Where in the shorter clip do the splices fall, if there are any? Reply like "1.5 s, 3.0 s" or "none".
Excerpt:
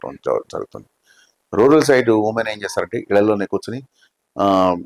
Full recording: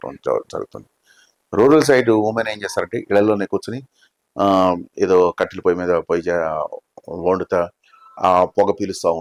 none